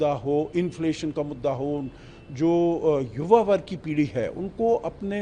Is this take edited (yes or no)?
no